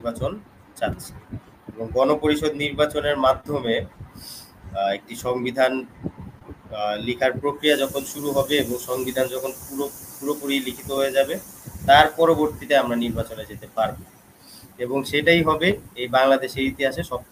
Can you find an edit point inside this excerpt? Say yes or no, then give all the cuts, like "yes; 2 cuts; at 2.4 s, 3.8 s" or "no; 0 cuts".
no; 0 cuts